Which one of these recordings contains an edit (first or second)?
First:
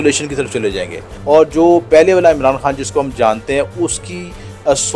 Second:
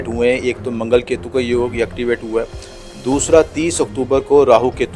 first